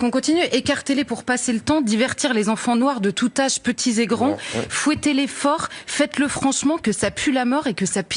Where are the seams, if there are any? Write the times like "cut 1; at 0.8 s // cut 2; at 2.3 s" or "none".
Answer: none